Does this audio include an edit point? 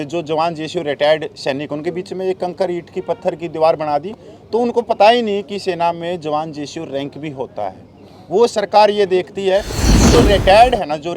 yes; 1 cut; at 10.1 s

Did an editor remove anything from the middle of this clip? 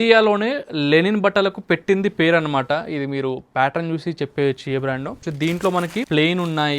yes; 2 cuts; at 5.2 s, 6.1 s

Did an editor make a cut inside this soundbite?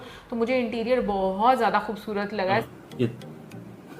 yes; 1 cut; at 2.7 s

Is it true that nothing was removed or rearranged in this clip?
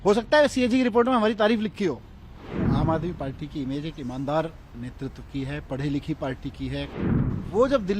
no; 2 cuts; at 2.5 s, 6.9 s

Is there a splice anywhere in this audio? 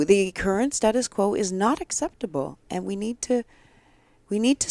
no; 0 cuts

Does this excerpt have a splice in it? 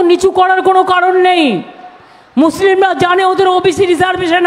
no; 0 cuts

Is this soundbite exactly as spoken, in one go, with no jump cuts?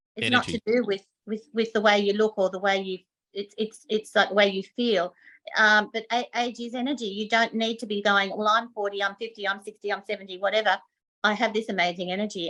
yes; 0 cuts

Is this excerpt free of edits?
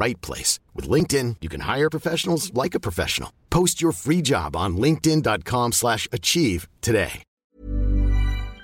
no; 1 cut; at 7.3 s

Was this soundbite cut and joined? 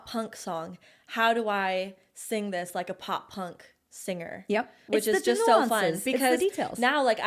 yes; 1 cut; at 4.8 s

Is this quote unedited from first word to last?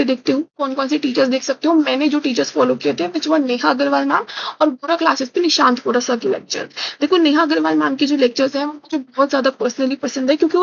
yes; 0 cuts

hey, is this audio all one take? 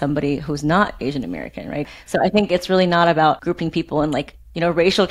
no; 2 cuts; at 1.9 s, 3.4 s

